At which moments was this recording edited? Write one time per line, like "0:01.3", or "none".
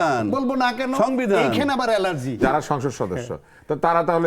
0:02.4

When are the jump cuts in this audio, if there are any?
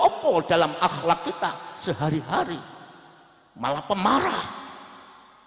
none

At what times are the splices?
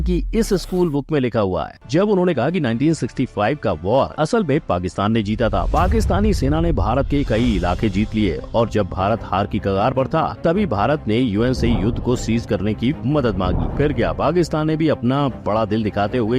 0:01.7

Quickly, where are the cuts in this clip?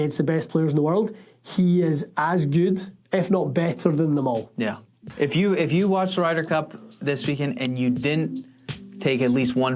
0:05.1

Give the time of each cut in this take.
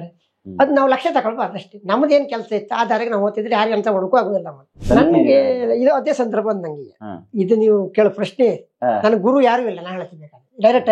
0:04.8

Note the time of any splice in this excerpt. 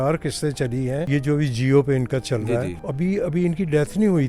0:01.1
0:02.8

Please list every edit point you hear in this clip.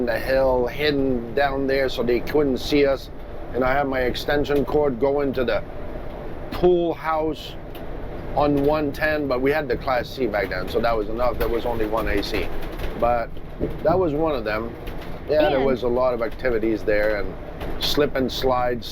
none

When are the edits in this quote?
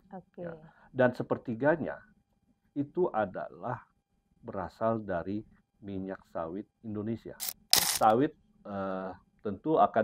0:07.8

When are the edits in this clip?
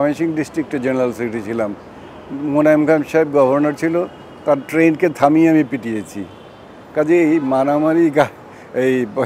none

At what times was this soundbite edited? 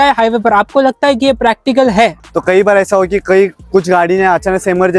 0:02.2

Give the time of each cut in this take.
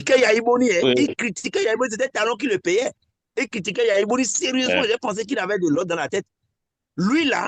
none

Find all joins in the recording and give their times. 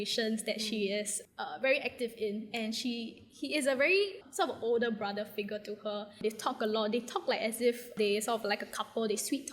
0:04.2
0:06.2
0:08.0

